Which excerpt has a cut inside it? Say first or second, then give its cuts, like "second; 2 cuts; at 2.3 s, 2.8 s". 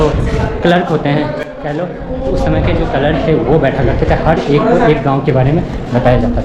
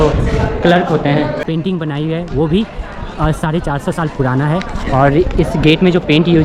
second; 1 cut; at 1.4 s